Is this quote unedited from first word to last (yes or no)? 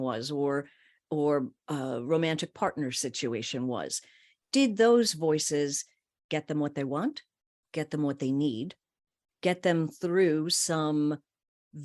yes